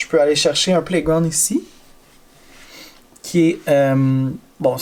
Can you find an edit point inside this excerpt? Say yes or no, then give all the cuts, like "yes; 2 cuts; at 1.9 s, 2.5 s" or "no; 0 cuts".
no; 0 cuts